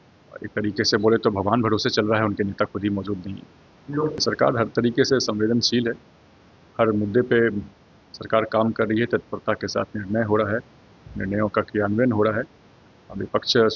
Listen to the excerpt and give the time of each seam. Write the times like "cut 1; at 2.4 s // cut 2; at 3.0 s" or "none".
cut 1; at 4.2 s